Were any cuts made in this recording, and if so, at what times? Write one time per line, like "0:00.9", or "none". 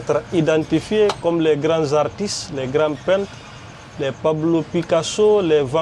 none